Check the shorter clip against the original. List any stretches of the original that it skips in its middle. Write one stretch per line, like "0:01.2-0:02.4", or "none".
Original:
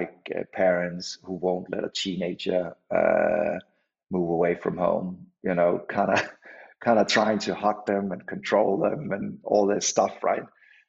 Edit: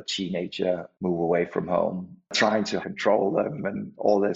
0:02.8-0:04.0
0:05.5-0:07.8